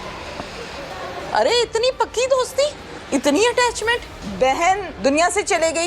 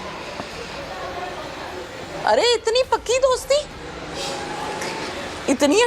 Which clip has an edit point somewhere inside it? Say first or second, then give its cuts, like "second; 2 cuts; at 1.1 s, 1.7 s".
first; 4 cuts; at 1.2 s, 2.9 s, 4.2 s, 4.9 s